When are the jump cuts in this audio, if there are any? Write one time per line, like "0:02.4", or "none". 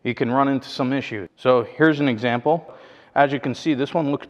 0:01.2
0:02.7